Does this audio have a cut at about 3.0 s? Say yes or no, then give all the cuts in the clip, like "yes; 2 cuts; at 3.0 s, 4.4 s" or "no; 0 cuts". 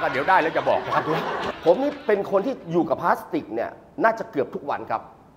no; 1 cut; at 1.5 s